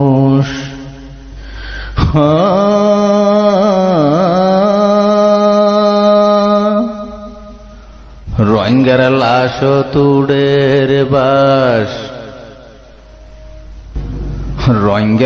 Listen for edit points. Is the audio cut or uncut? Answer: uncut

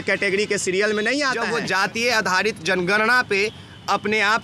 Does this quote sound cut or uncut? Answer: cut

